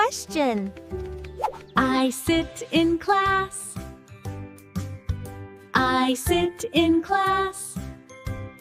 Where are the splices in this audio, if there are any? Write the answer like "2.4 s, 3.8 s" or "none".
1.6 s